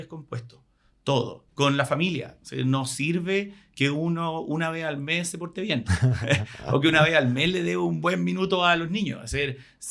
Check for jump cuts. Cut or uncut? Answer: cut